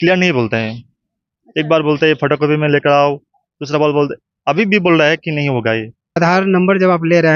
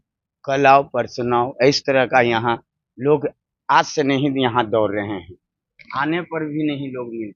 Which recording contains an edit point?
first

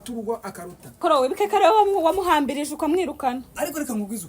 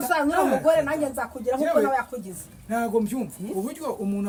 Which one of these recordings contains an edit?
first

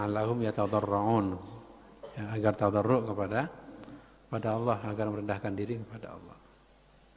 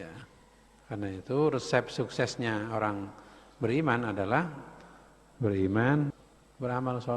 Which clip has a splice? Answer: second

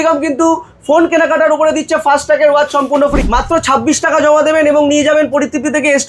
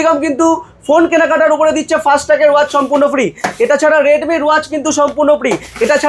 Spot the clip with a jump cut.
first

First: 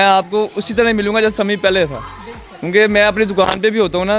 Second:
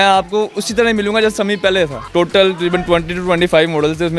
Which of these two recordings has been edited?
second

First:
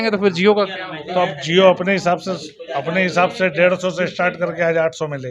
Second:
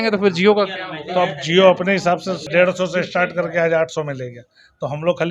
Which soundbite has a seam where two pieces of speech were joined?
second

